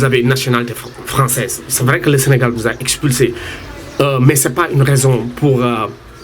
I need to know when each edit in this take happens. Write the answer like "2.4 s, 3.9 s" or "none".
1.6 s